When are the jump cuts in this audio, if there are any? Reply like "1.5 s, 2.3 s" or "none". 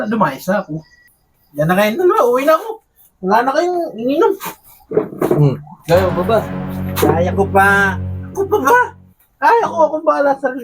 1.1 s